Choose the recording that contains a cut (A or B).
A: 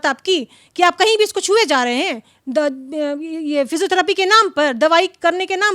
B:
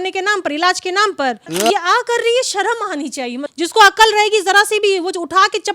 B